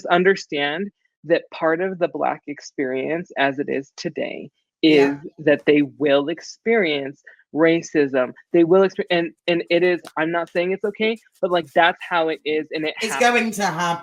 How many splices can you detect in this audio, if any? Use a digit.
0